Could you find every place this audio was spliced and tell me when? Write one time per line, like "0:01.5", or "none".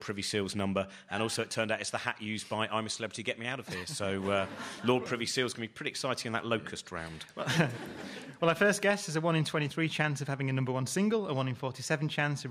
0:06.8